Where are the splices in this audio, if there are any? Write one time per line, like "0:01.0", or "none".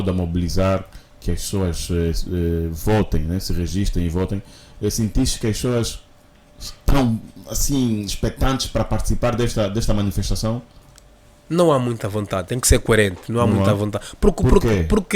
none

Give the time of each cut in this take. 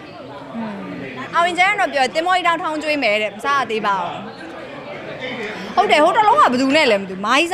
none

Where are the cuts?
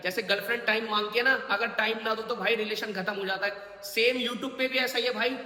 none

